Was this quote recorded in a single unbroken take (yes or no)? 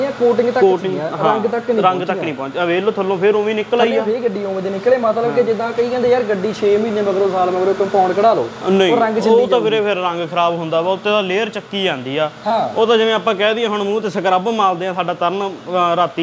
yes